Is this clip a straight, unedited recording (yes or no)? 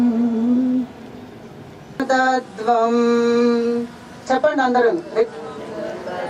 no